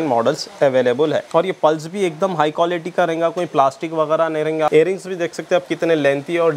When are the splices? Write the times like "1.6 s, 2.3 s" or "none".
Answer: 1.3 s, 4.7 s